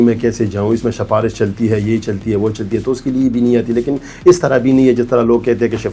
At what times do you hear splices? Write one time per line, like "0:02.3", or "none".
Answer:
none